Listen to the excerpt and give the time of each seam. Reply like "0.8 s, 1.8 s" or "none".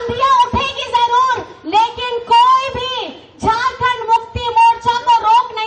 none